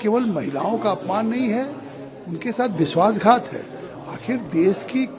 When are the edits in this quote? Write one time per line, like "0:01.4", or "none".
none